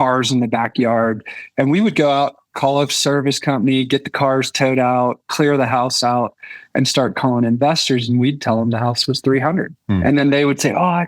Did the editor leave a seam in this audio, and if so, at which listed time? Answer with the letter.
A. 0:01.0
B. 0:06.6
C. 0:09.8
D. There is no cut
C